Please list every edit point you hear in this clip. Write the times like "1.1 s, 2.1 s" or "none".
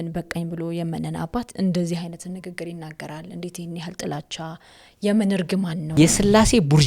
5.8 s